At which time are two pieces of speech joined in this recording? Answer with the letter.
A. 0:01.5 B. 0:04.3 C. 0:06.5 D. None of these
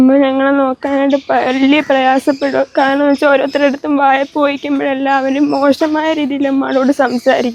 D